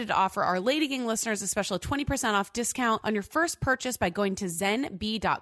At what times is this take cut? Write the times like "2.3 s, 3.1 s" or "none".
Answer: 3.0 s

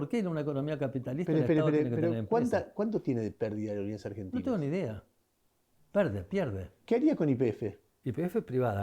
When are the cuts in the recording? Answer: 6.7 s, 7.9 s

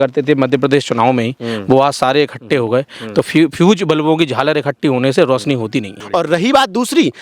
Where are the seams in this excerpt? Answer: 6.0 s

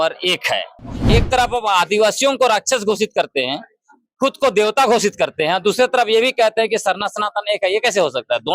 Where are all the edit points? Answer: 1.0 s

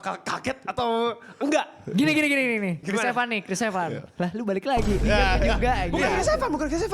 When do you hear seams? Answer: 2.8 s

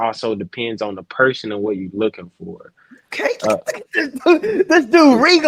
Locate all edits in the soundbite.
none

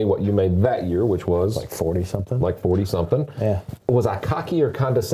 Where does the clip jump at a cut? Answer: 3.8 s

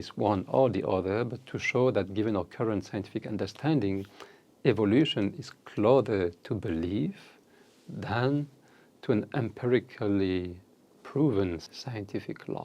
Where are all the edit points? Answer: 11.7 s

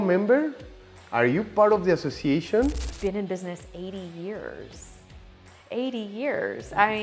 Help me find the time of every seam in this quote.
2.9 s

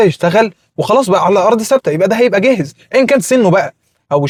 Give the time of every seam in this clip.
none

